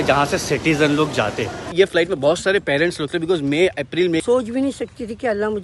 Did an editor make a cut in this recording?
yes; 2 cuts; at 1.6 s, 4.2 s

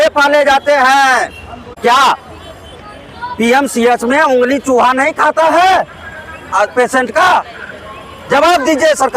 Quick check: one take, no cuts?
no; 1 cut; at 1.7 s

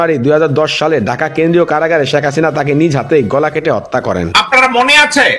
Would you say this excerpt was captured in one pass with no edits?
no; 1 cut; at 4.3 s

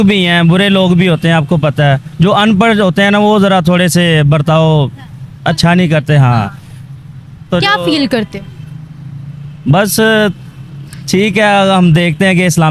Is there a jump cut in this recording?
no; 0 cuts

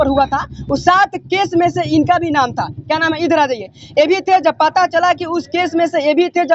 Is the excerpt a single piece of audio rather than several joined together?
yes; 0 cuts

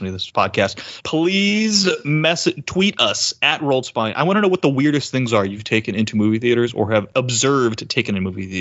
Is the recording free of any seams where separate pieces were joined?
no; 1 cut; at 7.1 s

